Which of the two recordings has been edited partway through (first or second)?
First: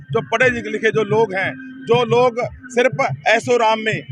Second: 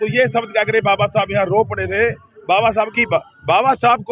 second